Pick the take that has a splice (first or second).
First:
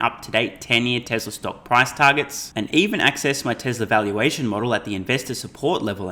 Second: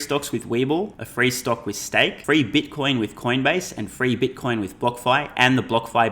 second